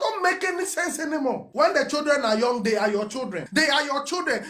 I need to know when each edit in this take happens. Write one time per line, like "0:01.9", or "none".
0:01.5
0:03.4